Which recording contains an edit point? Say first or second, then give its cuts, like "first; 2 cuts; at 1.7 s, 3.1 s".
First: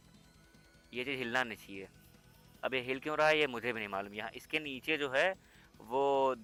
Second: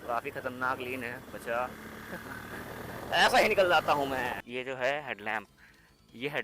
second; 1 cut; at 4.4 s